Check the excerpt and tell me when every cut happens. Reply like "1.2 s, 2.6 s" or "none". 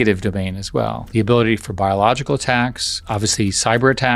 1.0 s